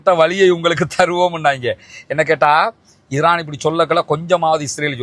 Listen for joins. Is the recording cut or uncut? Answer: uncut